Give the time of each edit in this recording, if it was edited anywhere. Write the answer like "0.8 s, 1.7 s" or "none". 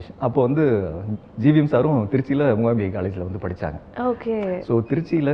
none